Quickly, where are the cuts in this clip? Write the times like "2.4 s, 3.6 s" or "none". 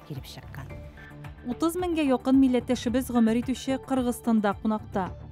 none